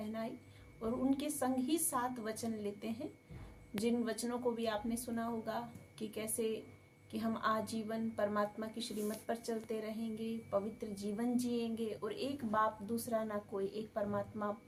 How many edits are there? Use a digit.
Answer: 0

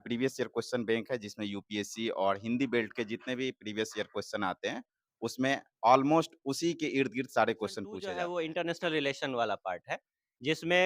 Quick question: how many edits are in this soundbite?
1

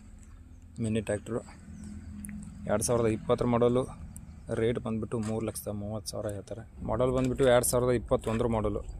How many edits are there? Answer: 1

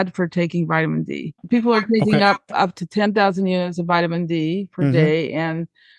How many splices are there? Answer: 1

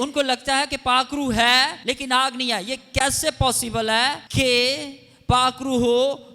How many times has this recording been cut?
2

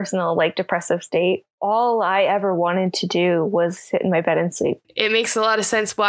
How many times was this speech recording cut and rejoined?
2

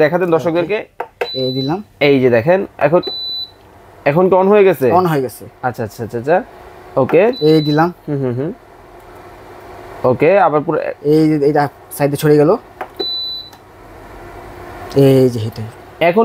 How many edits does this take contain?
0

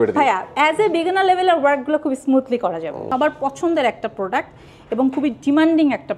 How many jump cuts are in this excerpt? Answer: 1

